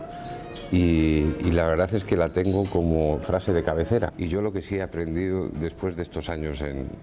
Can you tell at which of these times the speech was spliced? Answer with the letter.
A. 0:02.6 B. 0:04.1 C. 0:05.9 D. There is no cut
B